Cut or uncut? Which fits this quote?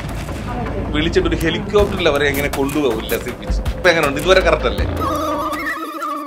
cut